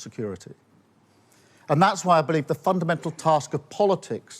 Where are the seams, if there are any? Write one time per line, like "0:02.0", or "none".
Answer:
0:01.1